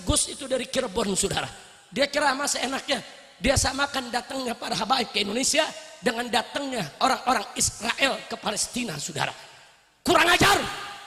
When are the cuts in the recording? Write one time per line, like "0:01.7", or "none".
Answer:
none

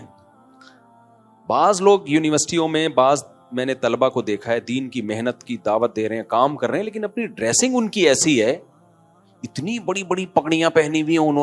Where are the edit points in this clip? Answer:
none

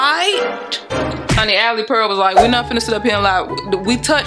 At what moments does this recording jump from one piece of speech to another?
0:01.5

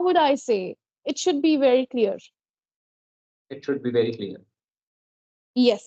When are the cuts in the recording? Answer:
none

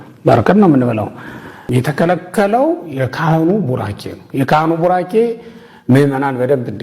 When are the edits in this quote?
0:01.6

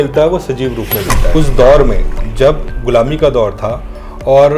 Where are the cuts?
0:01.2

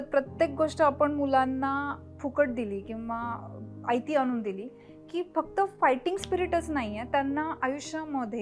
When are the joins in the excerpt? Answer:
none

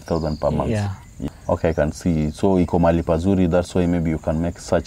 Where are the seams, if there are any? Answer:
0:01.1

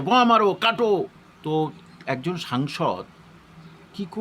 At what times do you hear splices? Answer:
0:01.3

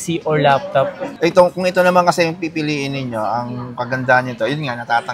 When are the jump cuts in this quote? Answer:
0:01.1

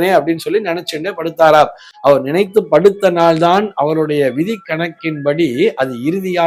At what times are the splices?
none

